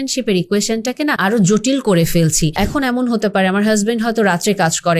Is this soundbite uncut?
no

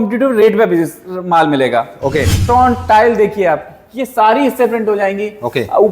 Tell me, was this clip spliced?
yes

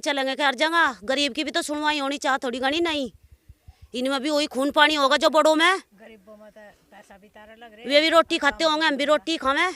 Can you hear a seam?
no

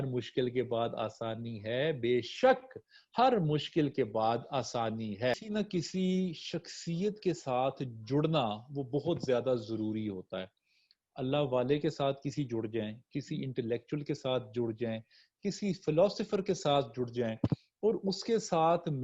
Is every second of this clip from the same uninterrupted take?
no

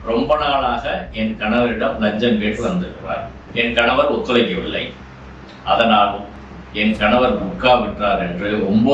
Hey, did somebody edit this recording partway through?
yes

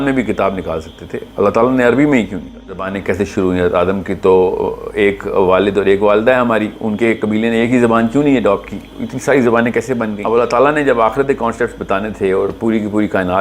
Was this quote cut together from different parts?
yes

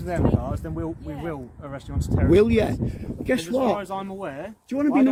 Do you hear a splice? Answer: no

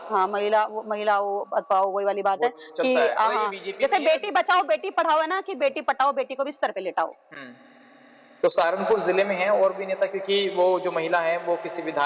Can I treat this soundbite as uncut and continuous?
yes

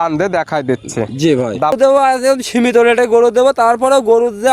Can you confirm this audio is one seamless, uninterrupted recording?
no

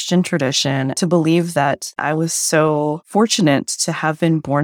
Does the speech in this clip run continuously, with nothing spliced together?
no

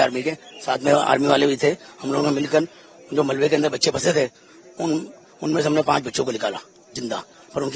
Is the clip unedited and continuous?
yes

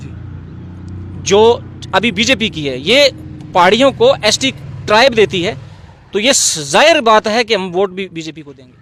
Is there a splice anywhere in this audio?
no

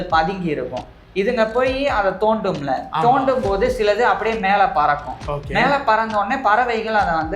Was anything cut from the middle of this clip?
no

